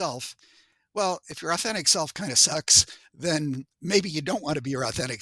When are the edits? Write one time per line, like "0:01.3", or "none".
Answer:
0:03.7

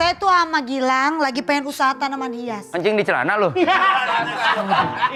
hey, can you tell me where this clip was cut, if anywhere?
none

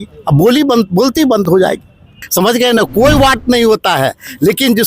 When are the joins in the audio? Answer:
0:02.2

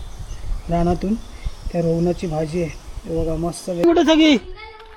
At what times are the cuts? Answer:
0:03.8

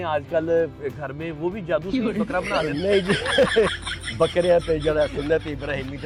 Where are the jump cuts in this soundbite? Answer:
none

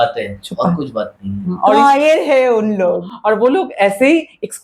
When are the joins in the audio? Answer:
none

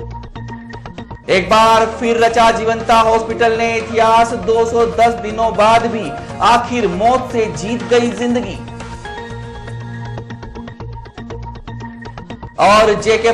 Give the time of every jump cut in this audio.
0:01.0

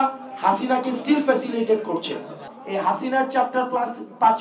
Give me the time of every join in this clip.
0:02.5

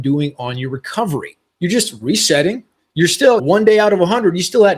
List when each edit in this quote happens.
0:01.4
0:03.4

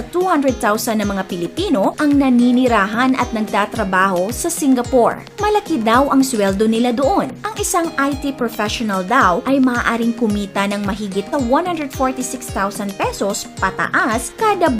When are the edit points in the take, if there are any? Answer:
0:05.3
0:07.5
0:11.3

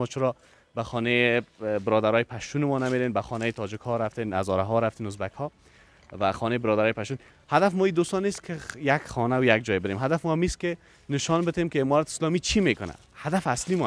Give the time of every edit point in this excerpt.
none

